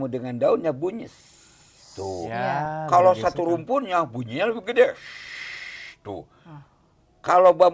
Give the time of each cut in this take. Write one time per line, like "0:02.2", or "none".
none